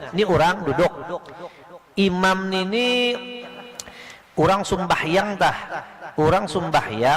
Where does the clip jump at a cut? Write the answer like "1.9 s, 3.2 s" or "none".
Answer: 3.9 s